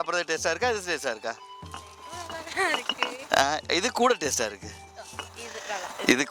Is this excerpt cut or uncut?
uncut